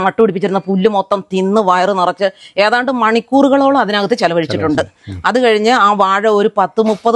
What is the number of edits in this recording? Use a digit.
0